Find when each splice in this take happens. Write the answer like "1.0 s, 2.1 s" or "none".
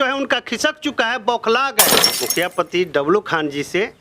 2.0 s